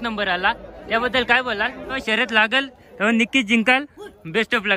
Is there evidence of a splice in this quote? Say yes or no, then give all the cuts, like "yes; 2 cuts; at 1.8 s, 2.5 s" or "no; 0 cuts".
yes; 1 cut; at 2.0 s